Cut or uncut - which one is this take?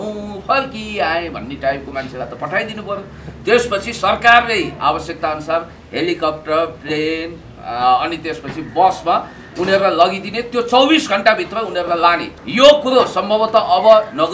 cut